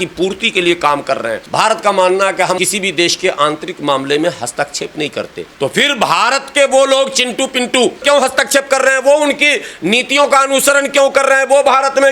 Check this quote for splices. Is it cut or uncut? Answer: cut